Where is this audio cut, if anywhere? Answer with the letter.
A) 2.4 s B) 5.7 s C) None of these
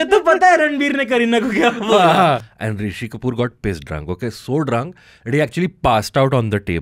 A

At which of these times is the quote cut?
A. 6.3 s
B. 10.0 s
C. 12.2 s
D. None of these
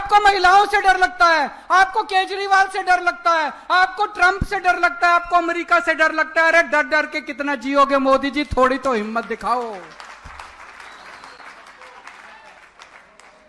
D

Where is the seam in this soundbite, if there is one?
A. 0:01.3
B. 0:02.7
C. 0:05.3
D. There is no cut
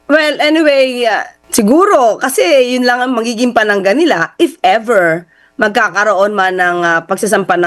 A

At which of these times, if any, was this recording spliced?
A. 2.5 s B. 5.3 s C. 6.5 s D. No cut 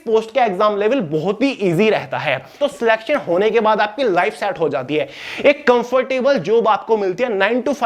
A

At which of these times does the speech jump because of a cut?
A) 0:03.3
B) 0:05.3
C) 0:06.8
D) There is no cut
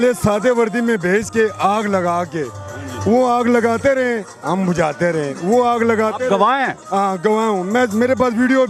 D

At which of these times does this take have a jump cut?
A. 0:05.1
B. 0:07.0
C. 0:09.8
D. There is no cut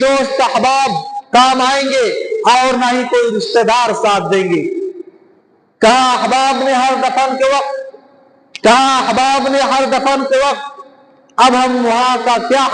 D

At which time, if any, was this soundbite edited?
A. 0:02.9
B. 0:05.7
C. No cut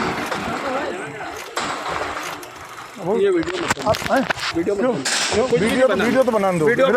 C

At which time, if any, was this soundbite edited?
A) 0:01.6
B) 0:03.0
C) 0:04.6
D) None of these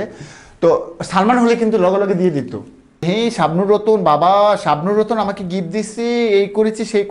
B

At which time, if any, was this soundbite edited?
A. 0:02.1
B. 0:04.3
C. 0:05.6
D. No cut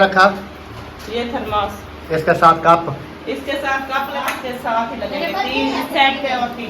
B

